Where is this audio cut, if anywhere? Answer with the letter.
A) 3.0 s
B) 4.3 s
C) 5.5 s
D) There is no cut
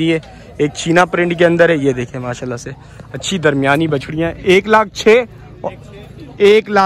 D